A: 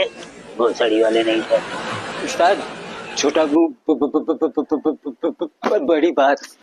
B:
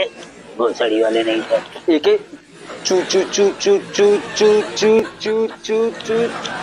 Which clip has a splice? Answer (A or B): B